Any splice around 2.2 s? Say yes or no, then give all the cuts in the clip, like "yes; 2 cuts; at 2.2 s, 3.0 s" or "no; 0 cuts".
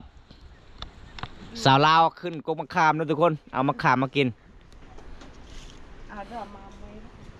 no; 1 cut; at 4.8 s